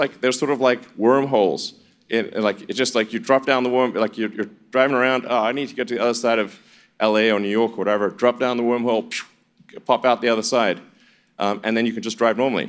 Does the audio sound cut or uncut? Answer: uncut